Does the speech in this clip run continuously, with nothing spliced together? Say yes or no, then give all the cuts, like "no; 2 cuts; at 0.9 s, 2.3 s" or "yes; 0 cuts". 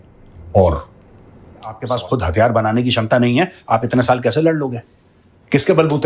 no; 1 cut; at 1.8 s